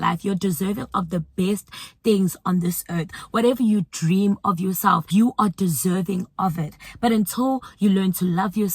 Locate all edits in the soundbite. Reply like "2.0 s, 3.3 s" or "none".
5.0 s